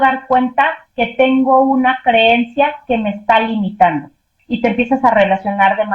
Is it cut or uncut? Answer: cut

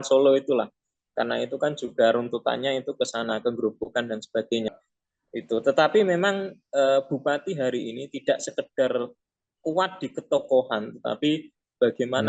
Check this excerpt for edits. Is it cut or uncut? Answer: cut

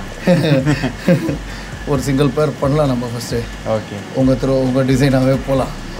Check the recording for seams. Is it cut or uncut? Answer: uncut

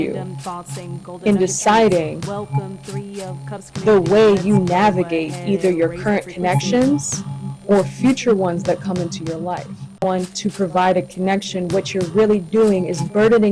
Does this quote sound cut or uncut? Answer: cut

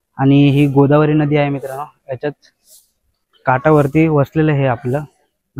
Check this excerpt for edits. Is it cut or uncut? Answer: uncut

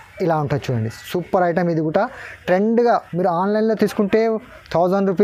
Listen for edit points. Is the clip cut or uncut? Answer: uncut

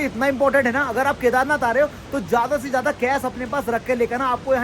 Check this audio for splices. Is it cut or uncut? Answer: uncut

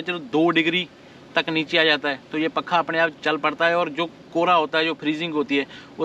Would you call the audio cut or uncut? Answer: uncut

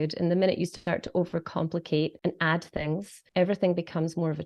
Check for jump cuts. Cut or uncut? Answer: cut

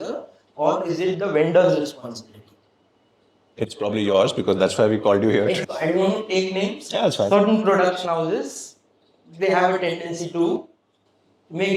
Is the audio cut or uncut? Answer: cut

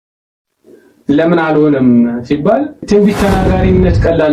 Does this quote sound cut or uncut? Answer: cut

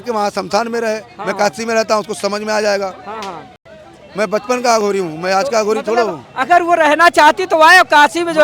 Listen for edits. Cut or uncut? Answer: uncut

